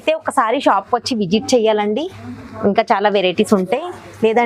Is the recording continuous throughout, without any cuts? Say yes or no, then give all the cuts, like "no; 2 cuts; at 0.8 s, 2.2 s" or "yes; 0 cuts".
yes; 0 cuts